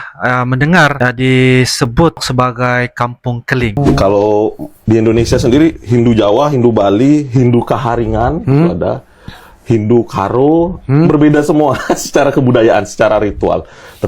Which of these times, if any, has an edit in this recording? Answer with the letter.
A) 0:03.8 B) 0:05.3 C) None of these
A